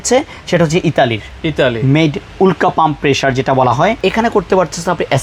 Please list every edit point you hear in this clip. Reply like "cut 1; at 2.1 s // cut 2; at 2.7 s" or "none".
cut 1; at 4.0 s